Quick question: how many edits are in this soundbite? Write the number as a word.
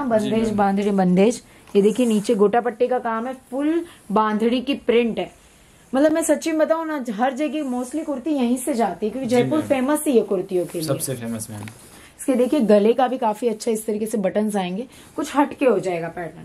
zero